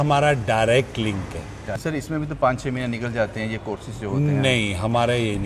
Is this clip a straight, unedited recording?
no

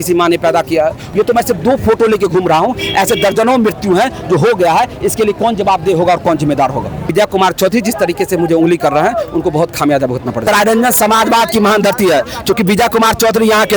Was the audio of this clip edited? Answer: yes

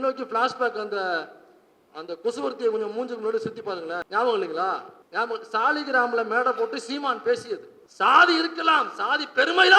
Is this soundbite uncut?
no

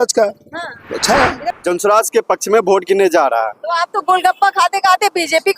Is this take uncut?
no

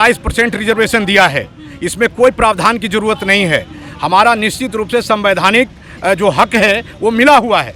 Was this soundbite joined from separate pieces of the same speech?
no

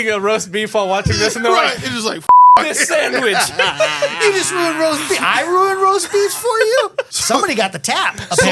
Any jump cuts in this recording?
yes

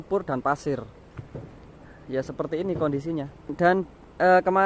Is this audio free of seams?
no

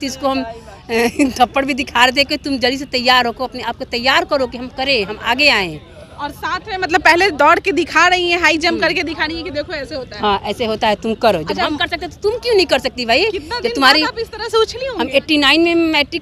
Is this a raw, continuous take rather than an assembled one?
yes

